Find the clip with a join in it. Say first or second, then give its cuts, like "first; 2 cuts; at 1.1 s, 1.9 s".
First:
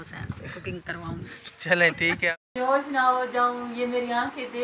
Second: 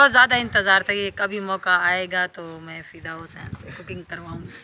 first; 1 cut; at 2.4 s